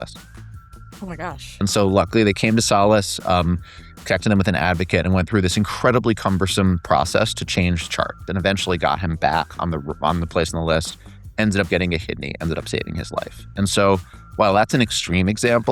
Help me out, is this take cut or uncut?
cut